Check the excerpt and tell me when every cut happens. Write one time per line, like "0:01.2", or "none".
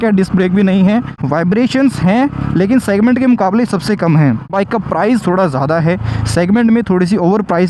0:01.1